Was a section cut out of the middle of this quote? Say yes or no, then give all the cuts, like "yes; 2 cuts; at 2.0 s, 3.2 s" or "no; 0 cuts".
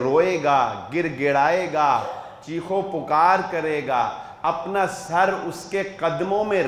no; 0 cuts